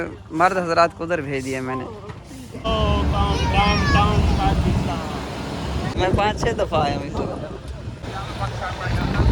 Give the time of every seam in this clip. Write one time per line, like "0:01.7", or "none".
0:02.5
0:05.9
0:08.0

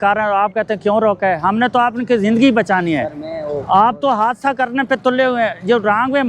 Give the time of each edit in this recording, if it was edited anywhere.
none

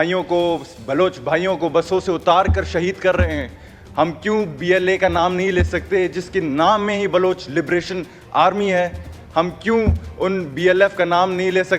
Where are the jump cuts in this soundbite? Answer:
none

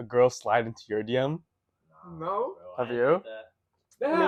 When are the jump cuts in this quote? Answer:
none

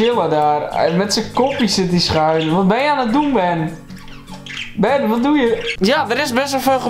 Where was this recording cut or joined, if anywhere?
0:05.7

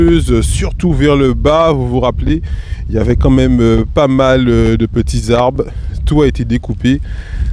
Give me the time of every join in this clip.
none

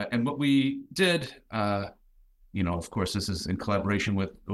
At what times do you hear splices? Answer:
none

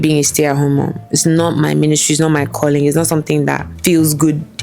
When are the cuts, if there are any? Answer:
0:03.7

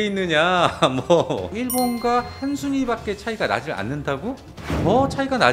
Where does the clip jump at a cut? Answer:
0:01.5
0:04.5

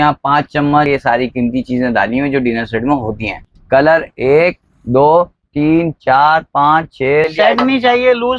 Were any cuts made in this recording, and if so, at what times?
0:00.9
0:03.4
0:07.3

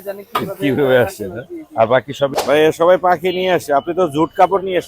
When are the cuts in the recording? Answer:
0:02.3

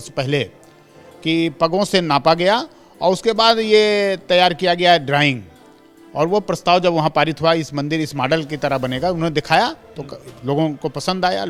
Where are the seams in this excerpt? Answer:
none

